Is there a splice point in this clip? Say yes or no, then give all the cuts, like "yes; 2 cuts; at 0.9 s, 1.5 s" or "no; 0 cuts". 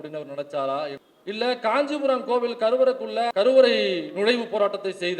yes; 2 cuts; at 1.0 s, 3.3 s